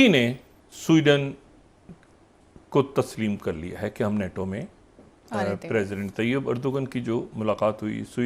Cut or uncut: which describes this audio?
uncut